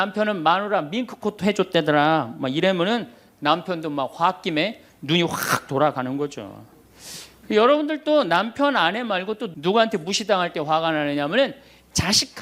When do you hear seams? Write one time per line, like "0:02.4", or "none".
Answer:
0:09.5